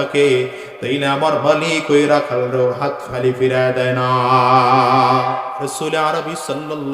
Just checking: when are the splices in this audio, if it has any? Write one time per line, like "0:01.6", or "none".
0:05.6